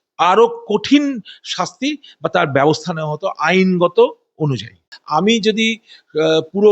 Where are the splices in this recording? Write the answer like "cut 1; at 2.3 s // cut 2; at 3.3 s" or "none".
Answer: cut 1; at 4.9 s